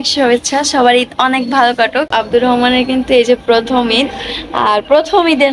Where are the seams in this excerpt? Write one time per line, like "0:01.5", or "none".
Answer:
0:02.1